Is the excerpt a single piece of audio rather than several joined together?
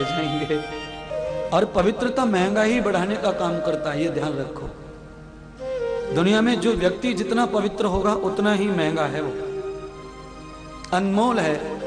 no; 1 cut; at 1.1 s

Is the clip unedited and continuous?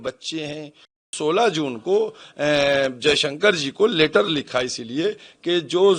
no; 1 cut; at 1.1 s

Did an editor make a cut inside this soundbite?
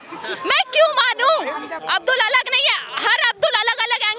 yes; 1 cut; at 1.8 s

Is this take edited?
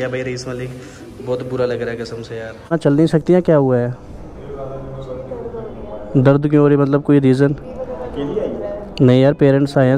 yes; 1 cut; at 2.7 s

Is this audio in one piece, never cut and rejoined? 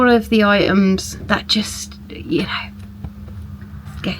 no; 1 cut; at 1.1 s

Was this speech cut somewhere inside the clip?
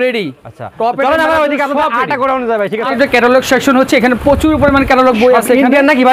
yes; 1 cut; at 2.9 s

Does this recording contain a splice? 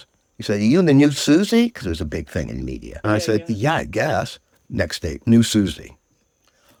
no; 0 cuts

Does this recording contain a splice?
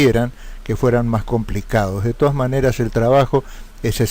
no; 0 cuts

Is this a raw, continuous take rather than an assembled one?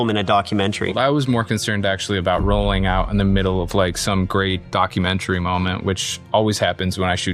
no; 1 cut; at 0.9 s

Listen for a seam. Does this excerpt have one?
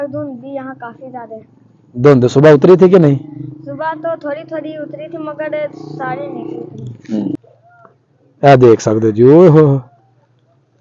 yes; 1 cut; at 7.4 s

